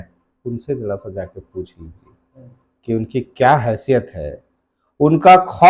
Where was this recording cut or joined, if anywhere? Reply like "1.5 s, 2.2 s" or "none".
none